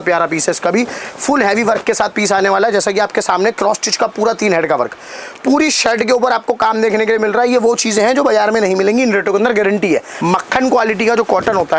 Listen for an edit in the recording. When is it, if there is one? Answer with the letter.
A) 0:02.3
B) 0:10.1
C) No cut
B